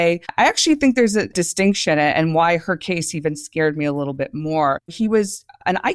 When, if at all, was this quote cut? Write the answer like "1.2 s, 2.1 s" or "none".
1.3 s